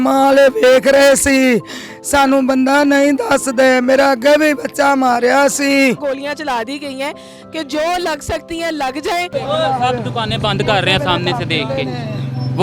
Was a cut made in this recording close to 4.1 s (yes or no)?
no